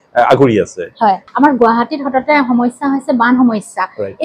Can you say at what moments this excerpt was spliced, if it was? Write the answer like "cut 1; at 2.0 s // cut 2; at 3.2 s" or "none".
cut 1; at 1.3 s